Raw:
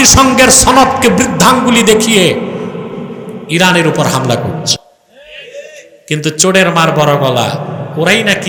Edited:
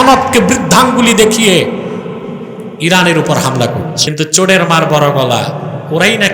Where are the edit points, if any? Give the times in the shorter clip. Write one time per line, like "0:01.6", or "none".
0:04.0